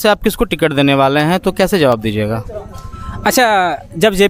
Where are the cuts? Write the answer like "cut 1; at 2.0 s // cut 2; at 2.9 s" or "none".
none